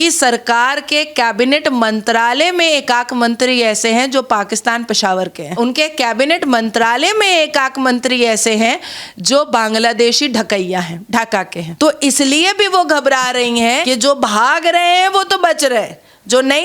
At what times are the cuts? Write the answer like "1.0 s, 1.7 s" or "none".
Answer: none